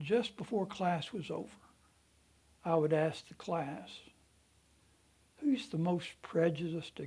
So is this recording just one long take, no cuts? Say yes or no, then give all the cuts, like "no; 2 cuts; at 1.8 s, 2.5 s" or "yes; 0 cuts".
yes; 0 cuts